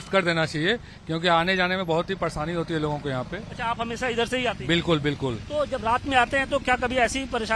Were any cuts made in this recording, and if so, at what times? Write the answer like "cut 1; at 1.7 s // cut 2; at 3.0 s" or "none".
none